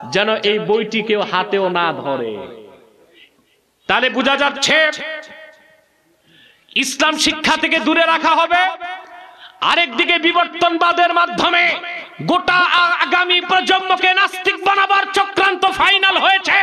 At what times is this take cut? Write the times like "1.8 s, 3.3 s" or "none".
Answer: none